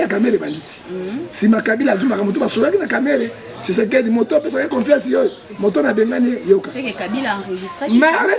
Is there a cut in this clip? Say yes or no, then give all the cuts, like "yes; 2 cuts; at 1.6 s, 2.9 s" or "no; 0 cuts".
no; 0 cuts